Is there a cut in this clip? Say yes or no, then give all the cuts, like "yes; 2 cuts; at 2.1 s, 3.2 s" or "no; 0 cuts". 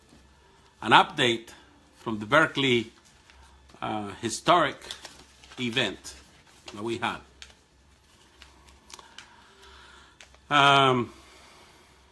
yes; 1 cut; at 4.8 s